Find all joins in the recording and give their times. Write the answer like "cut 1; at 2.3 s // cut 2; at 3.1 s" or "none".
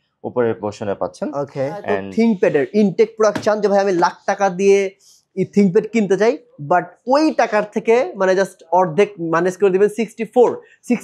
cut 1; at 2.0 s